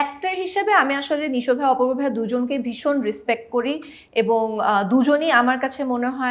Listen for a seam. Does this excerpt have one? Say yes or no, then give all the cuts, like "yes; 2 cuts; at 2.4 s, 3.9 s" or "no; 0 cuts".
no; 0 cuts